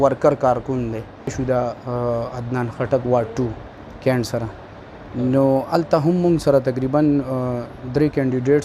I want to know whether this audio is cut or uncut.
cut